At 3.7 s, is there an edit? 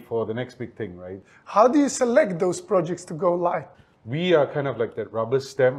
yes; 2 cuts; at 1.3 s, 3.7 s

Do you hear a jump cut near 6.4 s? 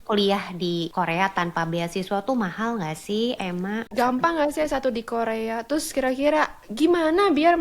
no; 2 cuts; at 0.9 s, 3.9 s

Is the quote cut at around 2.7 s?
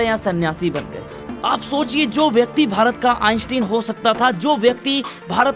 no; 1 cut; at 1.4 s

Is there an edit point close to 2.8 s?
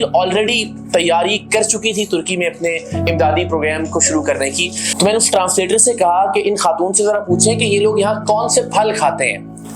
no; 1 cut; at 4.8 s

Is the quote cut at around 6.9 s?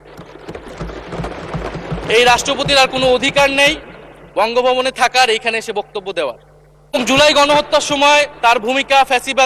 yes; 1 cut; at 6.9 s

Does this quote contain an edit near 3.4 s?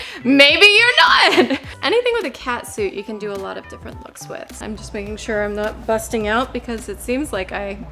no; 2 cuts; at 1.7 s, 4.6 s

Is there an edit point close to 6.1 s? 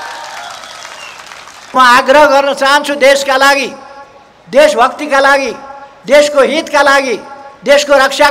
no; 1 cut; at 1.7 s

